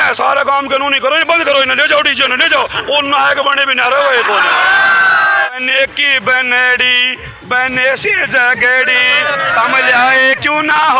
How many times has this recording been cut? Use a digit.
1